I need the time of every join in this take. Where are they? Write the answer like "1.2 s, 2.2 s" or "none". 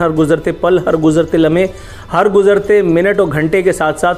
none